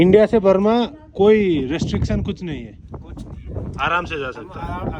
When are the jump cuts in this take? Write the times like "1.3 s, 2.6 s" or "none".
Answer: none